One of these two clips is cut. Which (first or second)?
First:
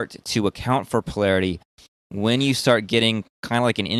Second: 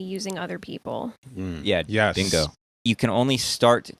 second